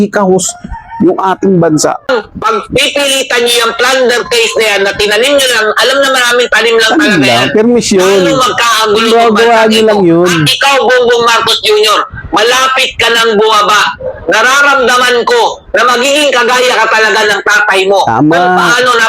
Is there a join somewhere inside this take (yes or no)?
yes